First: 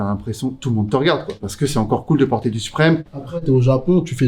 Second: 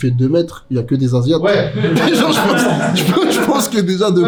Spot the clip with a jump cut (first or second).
first